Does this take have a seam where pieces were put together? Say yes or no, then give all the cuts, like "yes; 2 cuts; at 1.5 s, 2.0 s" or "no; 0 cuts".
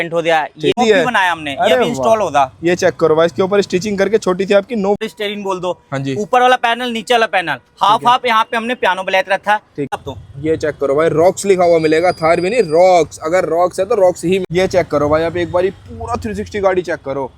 yes; 4 cuts; at 0.8 s, 5.0 s, 9.9 s, 14.5 s